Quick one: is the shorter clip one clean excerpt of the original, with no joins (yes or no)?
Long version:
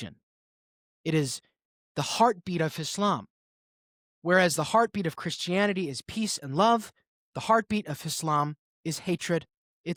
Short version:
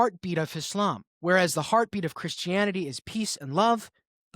no